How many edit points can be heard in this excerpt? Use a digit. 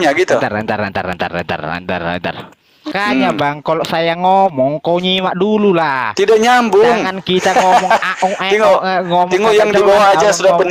1